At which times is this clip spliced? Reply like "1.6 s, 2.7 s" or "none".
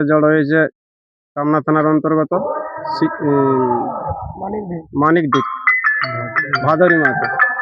none